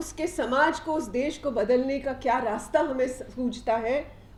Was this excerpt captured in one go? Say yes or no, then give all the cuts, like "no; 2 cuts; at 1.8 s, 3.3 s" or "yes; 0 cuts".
yes; 0 cuts